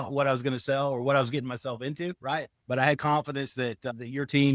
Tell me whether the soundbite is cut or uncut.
cut